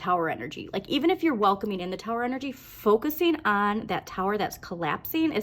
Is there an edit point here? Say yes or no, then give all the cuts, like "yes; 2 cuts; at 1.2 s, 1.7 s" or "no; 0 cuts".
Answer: no; 0 cuts